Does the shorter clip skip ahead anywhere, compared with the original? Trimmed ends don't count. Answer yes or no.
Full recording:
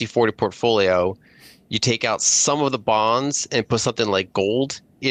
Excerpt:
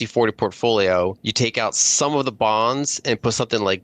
yes